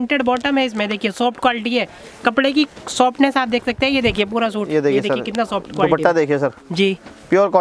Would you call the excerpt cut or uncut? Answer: uncut